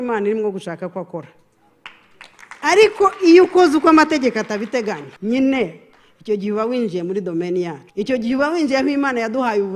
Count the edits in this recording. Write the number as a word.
two